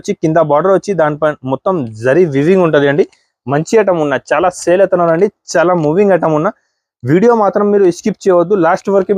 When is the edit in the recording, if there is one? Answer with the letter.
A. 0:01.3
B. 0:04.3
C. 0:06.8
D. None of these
D